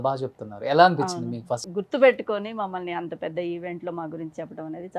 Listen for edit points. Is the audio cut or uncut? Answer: cut